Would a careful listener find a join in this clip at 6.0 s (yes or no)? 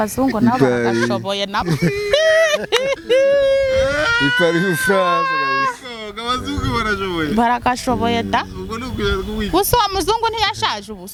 no